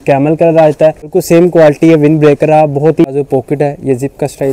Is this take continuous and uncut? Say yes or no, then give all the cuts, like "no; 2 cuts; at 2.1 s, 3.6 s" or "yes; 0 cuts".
no; 2 cuts; at 1.1 s, 3.1 s